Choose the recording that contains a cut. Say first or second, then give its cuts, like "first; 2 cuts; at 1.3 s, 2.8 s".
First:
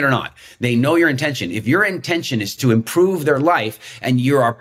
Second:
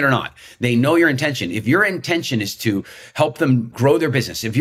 first; 1 cut; at 2.6 s